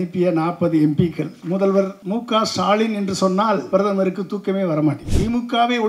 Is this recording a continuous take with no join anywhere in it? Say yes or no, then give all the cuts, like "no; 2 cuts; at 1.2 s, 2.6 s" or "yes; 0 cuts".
no; 4 cuts; at 1.3 s, 2.0 s, 3.6 s, 5.1 s